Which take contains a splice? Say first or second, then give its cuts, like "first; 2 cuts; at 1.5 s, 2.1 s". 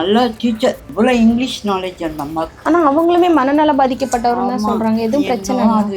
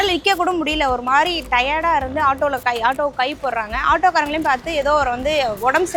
first; 2 cuts; at 0.8 s, 2.5 s